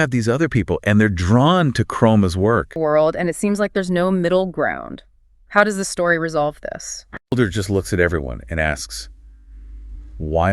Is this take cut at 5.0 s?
no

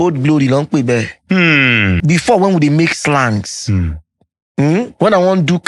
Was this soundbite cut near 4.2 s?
no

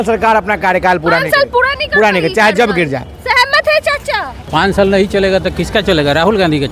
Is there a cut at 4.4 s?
yes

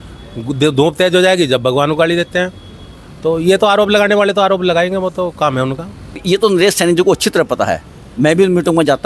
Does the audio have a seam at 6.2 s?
yes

